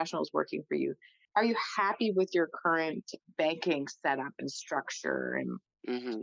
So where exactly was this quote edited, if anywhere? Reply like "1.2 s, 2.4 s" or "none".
none